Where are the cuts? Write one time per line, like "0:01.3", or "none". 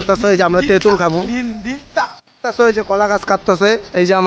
0:02.1